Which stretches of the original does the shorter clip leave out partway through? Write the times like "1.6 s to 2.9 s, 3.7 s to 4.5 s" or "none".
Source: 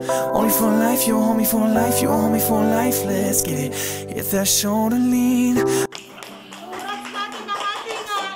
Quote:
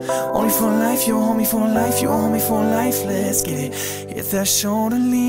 none